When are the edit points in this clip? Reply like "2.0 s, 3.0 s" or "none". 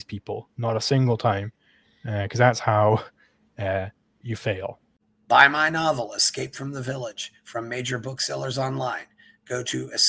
4.9 s